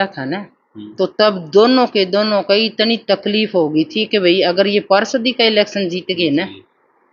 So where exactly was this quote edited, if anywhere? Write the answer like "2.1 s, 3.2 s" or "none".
none